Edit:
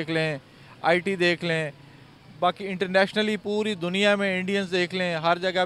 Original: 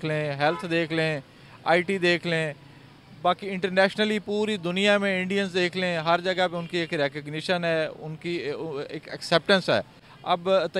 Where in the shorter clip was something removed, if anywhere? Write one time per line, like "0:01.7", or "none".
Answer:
none